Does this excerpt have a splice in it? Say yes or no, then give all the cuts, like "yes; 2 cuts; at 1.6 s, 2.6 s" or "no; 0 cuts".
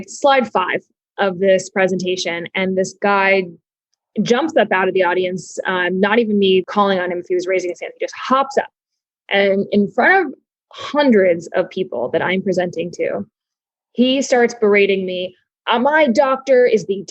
yes; 1 cut; at 6.7 s